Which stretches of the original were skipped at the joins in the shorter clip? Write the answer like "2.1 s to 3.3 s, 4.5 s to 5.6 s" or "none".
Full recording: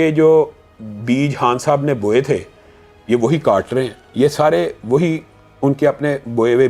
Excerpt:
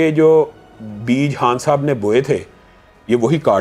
none